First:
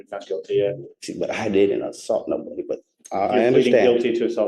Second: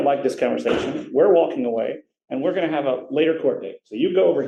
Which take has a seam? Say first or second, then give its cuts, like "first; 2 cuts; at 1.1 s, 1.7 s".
first; 1 cut; at 0.9 s